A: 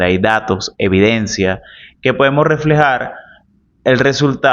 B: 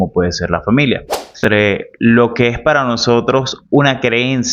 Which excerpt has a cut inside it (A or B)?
B